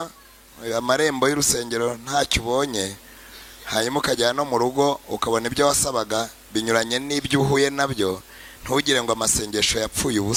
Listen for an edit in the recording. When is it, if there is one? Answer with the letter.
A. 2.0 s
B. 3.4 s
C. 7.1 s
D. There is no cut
D